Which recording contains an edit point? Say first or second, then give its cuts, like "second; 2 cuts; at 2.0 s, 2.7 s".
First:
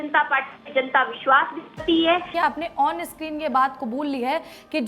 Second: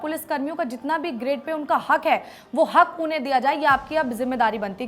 first; 1 cut; at 2.3 s